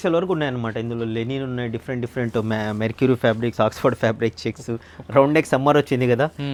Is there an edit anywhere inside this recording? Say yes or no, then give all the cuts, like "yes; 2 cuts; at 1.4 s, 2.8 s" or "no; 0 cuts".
no; 0 cuts